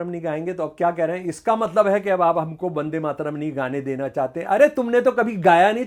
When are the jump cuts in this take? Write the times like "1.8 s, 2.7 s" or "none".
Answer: none